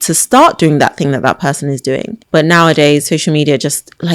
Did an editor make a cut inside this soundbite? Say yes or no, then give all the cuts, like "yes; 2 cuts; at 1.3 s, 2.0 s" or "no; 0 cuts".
yes; 1 cut; at 2.1 s